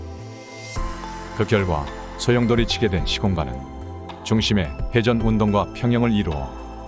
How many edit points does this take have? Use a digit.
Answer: 1